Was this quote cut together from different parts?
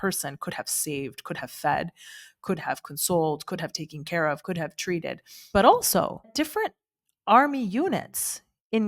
yes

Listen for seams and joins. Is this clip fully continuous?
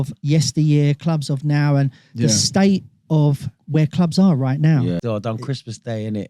no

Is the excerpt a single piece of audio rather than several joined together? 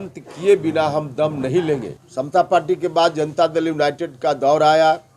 no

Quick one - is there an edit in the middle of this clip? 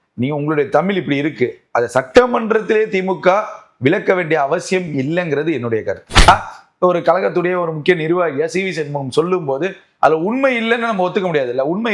yes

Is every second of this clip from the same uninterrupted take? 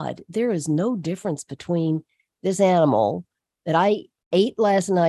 yes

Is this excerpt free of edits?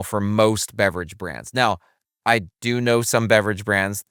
yes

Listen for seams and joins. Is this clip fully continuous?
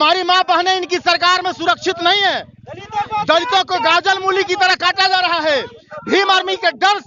yes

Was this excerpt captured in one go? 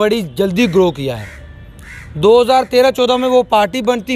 yes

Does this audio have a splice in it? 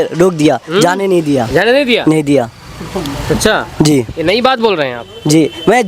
no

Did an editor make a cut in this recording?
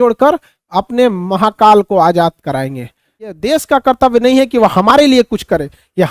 yes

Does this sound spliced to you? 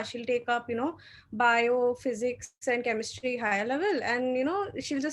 no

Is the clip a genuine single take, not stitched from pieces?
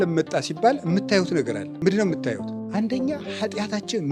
no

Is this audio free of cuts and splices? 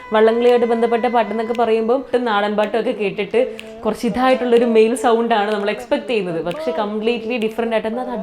no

